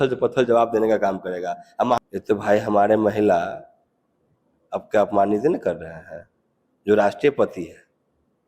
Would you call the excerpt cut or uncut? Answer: cut